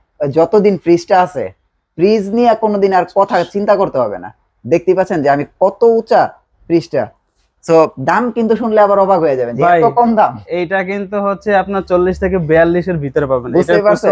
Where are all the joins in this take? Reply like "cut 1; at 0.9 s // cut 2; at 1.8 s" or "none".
none